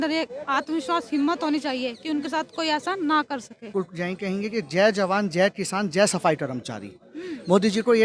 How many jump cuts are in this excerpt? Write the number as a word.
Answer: one